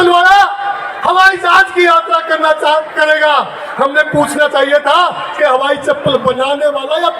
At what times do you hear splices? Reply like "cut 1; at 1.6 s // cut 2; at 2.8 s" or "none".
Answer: none